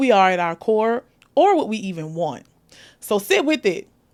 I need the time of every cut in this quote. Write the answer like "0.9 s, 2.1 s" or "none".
none